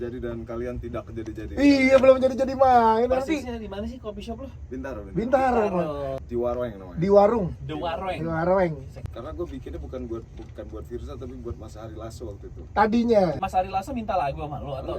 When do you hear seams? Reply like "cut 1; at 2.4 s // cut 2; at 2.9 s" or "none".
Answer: cut 1; at 6.1 s // cut 2; at 9.0 s // cut 3; at 13.4 s